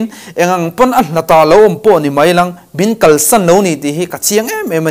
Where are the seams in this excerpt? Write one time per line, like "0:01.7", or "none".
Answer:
none